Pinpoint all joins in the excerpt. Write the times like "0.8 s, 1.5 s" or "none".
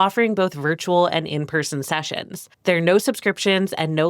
2.4 s